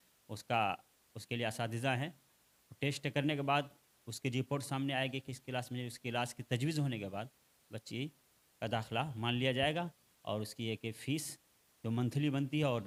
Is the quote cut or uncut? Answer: uncut